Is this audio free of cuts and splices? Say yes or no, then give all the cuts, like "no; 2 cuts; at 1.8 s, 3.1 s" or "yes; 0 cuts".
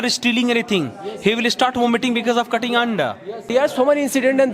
no; 1 cut; at 3.5 s